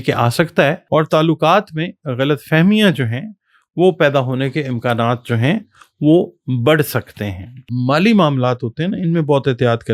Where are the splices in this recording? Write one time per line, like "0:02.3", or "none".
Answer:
0:00.8
0:07.7